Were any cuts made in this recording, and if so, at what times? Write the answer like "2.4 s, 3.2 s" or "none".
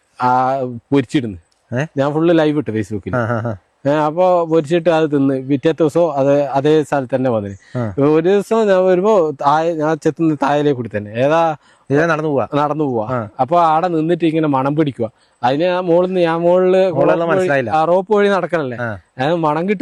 none